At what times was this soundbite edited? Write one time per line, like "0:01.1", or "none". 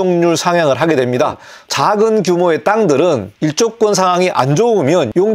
0:01.4